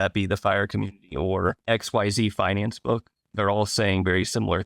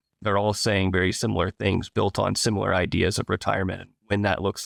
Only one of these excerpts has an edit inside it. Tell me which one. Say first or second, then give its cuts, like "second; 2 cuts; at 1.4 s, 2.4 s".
first; 1 cut; at 1.6 s